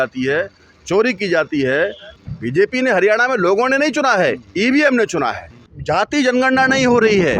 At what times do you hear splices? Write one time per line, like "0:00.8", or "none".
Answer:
0:02.1
0:05.7